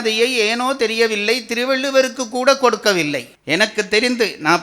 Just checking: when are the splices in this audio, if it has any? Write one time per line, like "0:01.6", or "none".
0:03.3